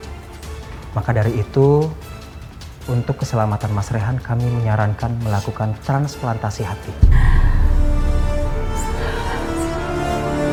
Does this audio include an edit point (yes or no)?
no